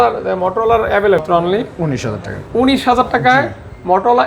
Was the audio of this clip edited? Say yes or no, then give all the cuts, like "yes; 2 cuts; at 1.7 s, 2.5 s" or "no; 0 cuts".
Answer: yes; 1 cut; at 1.2 s